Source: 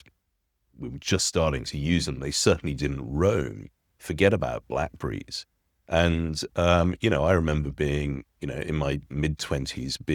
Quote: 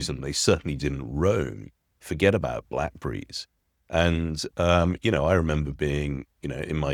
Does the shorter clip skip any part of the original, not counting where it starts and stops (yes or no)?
no